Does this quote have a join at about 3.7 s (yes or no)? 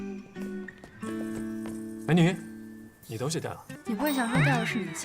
yes